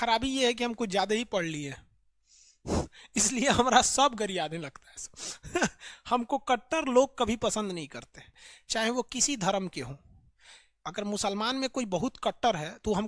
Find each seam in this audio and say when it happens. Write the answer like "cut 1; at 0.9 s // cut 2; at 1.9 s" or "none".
none